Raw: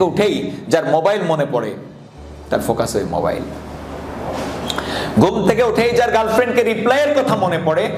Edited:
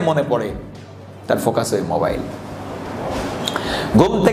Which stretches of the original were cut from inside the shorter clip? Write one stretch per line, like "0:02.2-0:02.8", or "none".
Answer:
none